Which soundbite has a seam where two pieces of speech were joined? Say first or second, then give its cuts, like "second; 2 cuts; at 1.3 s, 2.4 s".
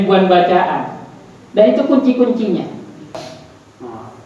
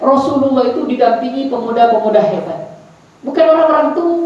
first; 1 cut; at 3.3 s